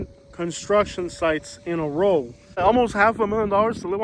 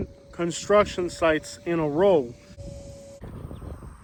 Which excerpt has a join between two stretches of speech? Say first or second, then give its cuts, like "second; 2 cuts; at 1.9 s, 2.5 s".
first; 1 cut; at 2.6 s